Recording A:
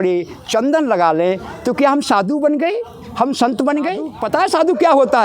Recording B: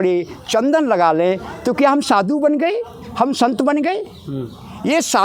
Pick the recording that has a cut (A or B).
A